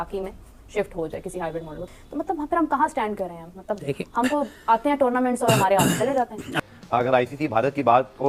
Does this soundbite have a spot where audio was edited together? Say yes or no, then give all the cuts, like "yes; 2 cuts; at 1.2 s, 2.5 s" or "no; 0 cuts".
yes; 2 cuts; at 1.8 s, 6.6 s